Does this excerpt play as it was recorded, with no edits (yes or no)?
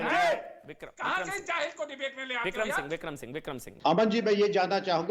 no